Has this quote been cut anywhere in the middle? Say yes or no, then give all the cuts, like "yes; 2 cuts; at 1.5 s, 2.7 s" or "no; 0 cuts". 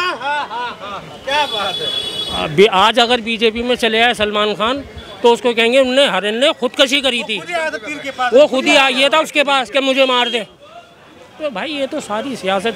no; 0 cuts